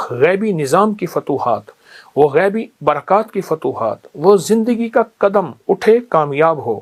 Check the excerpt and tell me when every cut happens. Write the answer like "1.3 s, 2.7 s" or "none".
none